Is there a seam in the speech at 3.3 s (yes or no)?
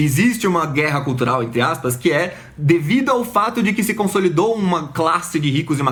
no